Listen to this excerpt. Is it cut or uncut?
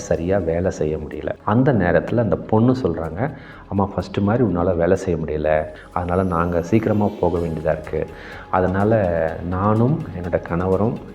cut